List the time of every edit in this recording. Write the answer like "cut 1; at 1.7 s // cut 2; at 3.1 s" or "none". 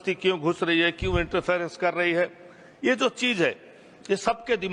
none